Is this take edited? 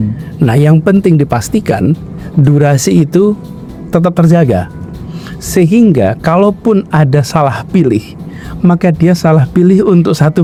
no; 0 cuts

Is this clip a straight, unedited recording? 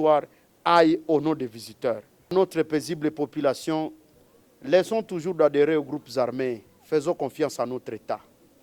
no; 1 cut; at 2.3 s

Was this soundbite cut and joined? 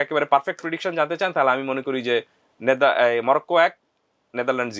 no; 0 cuts

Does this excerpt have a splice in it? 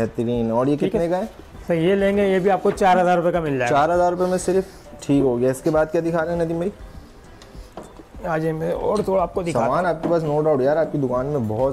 no; 0 cuts

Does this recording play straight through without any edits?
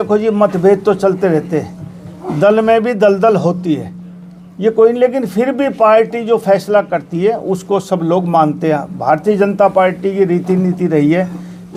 yes; 0 cuts

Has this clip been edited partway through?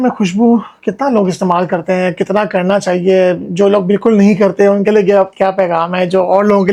no; 0 cuts

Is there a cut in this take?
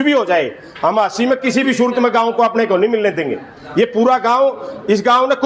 no; 0 cuts

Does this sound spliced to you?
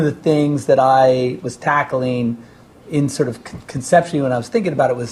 no; 0 cuts

